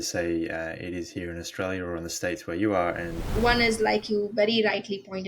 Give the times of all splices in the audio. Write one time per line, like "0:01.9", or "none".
0:03.2